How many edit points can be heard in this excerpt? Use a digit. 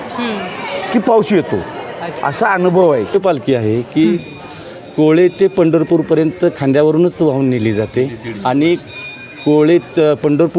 1